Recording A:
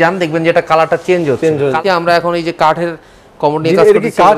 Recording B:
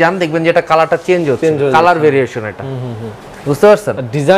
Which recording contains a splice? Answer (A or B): A